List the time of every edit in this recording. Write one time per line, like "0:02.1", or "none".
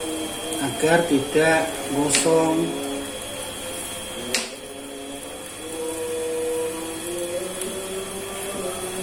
none